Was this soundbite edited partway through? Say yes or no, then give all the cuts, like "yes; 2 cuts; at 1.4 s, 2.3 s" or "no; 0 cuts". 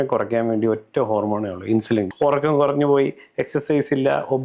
yes; 1 cut; at 2.1 s